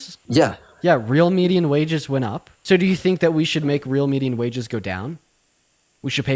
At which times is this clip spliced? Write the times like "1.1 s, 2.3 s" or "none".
2.5 s

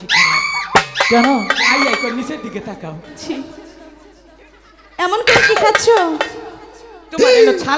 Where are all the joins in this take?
3.2 s

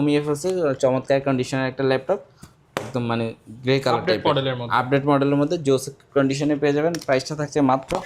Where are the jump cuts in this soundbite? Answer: none

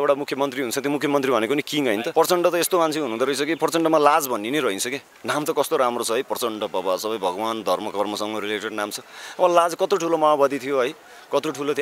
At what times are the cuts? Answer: 2.1 s

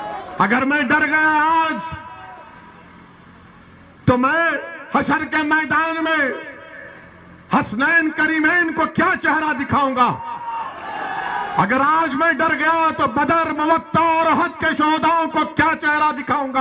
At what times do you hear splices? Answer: none

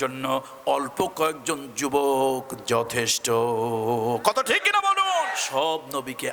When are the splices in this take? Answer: 5.4 s

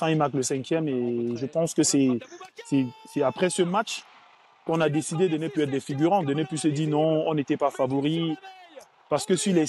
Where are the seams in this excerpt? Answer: none

